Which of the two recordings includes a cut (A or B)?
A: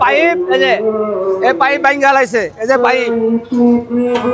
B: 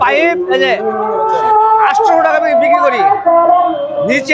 B